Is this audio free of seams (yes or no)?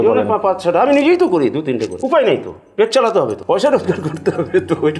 no